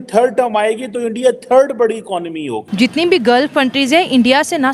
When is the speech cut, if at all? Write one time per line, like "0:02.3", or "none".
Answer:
0:02.6